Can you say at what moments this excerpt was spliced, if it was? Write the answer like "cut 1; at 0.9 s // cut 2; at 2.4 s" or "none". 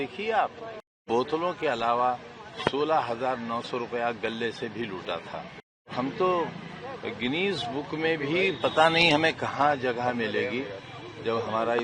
cut 1; at 1.0 s // cut 2; at 5.9 s